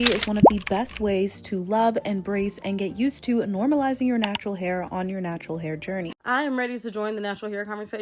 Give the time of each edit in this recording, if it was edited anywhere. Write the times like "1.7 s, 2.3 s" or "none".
6.1 s

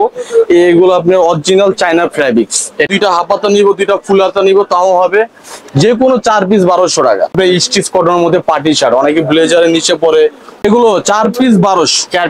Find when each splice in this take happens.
2.9 s, 7.3 s, 10.5 s

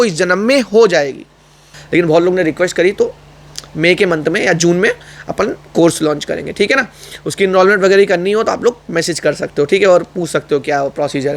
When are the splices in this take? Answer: 1.7 s

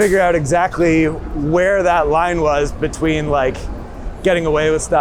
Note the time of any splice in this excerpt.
none

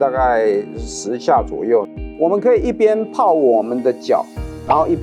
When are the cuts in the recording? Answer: 2.0 s

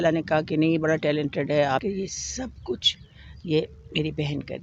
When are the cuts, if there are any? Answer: 1.8 s

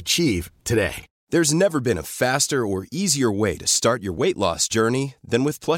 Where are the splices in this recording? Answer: 1.1 s

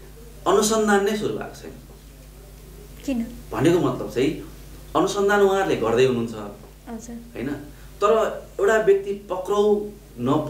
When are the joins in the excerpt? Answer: none

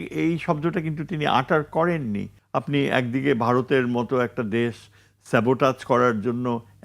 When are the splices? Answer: 2.3 s

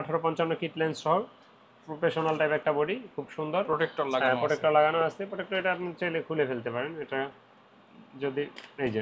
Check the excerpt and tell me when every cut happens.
none

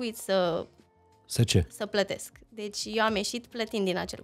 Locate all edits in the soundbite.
none

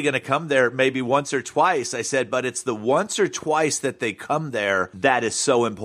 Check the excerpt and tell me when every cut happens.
4.9 s

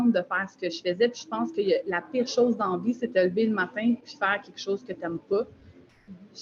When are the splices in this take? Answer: none

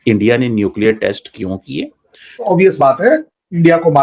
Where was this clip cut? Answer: 2.5 s

